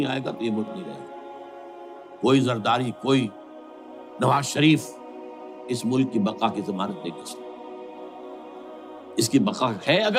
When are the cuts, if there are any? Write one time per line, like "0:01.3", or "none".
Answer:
none